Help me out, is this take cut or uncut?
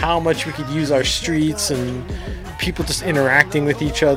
uncut